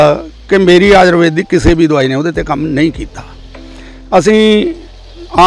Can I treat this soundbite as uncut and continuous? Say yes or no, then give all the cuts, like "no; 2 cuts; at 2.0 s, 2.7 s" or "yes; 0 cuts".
yes; 0 cuts